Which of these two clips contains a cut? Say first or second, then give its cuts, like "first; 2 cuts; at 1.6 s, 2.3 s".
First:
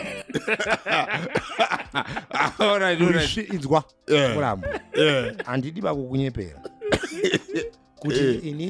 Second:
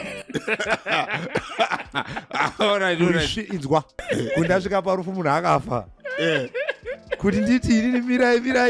second; 1 cut; at 4.0 s